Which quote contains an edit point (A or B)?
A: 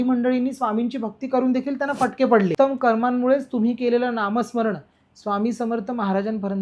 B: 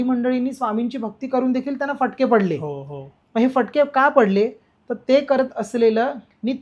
A